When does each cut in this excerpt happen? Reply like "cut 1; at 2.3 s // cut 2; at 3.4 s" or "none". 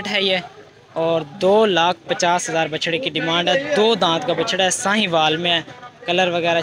none